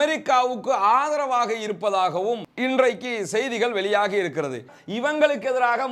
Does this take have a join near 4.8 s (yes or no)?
yes